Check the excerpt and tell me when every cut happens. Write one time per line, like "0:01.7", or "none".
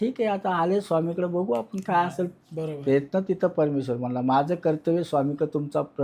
none